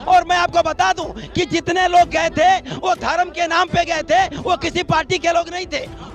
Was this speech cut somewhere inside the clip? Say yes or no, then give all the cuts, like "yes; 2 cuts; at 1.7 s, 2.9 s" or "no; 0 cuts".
no; 0 cuts